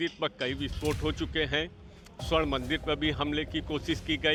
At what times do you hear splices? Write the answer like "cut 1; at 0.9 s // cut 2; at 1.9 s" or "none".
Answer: none